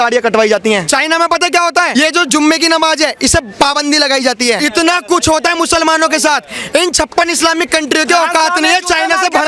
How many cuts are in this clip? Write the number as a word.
three